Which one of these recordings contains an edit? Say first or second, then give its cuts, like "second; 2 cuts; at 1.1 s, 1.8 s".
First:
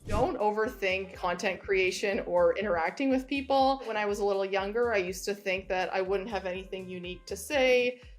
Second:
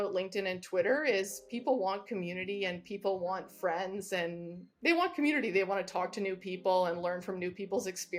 first; 2 cuts; at 1.1 s, 3.9 s